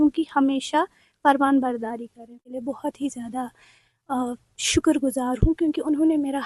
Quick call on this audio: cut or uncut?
cut